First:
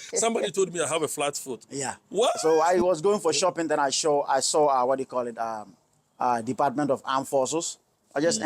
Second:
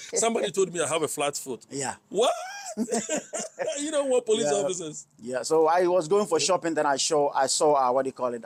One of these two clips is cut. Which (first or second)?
first